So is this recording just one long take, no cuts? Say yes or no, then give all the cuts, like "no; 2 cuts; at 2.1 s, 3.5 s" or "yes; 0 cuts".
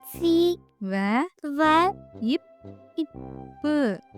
yes; 0 cuts